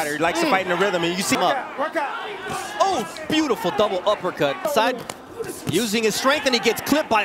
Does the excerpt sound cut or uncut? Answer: cut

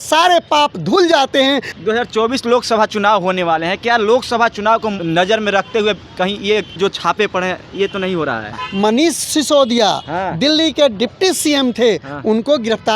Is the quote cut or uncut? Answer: cut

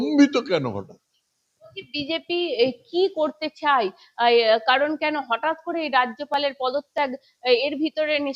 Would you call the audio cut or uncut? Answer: uncut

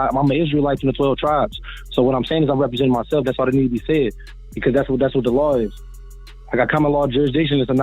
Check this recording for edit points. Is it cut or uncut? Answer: uncut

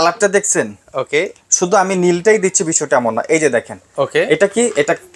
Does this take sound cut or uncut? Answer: uncut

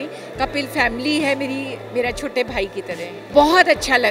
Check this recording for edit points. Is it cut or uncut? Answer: cut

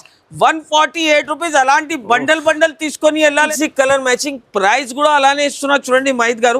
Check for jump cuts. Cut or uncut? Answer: cut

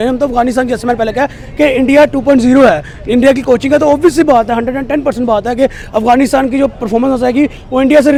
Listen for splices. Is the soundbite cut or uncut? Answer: uncut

